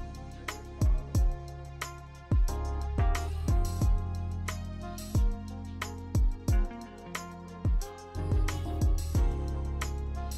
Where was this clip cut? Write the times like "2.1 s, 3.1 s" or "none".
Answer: 4.1 s